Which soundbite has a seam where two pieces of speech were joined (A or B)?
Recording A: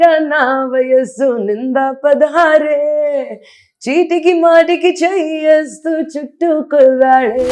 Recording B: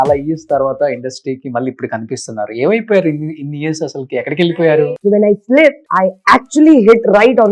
B